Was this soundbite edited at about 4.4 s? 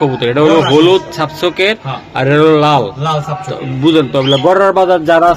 no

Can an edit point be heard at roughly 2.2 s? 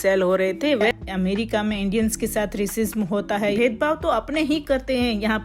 no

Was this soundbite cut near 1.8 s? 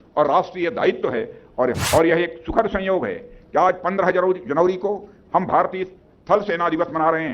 yes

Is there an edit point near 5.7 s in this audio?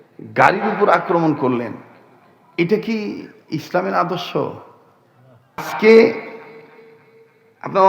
yes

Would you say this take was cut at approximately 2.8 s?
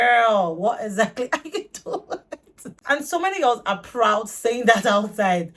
yes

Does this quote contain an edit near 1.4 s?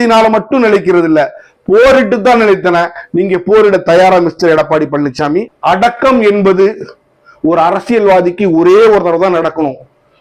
no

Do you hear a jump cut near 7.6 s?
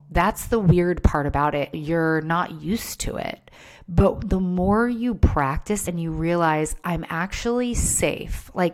no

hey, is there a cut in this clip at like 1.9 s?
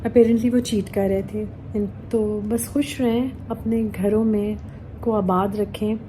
yes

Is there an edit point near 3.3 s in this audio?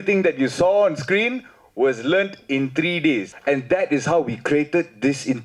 yes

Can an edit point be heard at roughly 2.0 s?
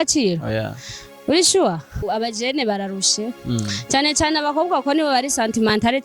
yes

